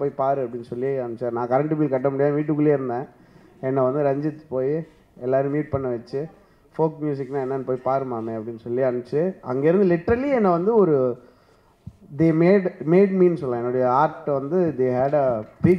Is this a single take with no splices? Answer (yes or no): yes